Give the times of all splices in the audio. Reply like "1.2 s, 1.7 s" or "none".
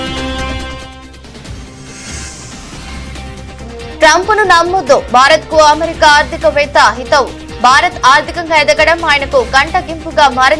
4.0 s

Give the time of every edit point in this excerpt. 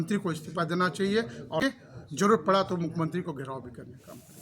1.6 s

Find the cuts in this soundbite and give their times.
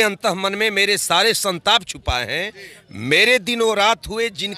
none

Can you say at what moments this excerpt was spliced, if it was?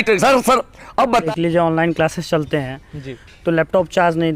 1.3 s

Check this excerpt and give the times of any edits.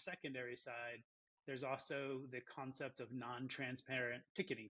none

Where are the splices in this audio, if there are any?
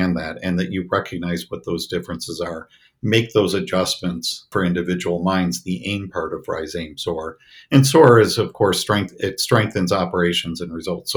4.5 s

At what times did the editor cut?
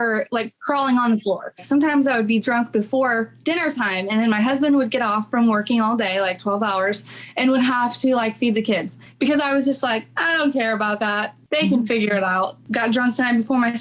1.6 s, 12.6 s

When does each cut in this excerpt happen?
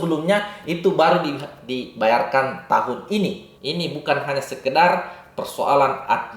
3.5 s

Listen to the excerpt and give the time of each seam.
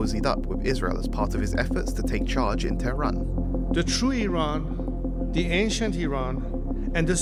none

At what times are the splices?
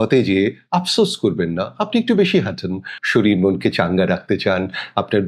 2.9 s

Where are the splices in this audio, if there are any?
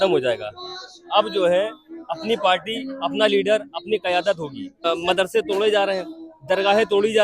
4.8 s

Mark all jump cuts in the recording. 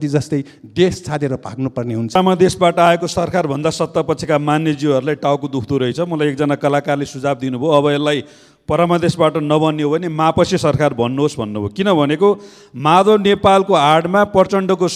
2.2 s

